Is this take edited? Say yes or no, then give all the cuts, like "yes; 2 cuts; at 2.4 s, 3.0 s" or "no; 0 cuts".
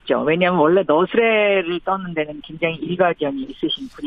yes; 1 cut; at 1.1 s